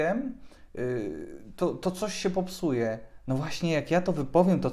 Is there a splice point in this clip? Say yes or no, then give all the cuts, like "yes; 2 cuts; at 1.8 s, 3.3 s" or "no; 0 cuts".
no; 0 cuts